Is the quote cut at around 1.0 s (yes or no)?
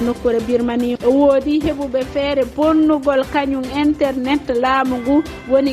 yes